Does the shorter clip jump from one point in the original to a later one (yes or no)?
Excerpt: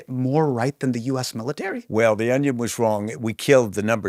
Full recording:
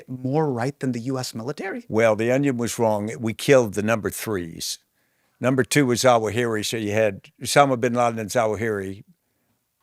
no